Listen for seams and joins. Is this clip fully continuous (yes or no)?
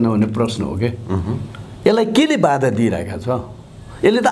yes